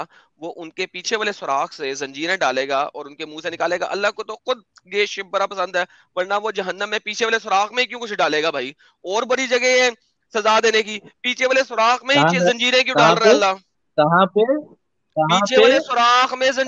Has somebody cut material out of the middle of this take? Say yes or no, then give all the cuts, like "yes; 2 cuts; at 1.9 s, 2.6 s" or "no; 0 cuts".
no; 0 cuts